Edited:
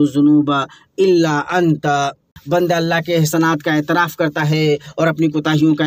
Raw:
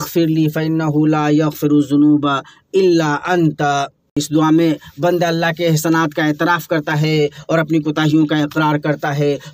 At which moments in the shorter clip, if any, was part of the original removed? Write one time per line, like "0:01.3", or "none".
0:02.3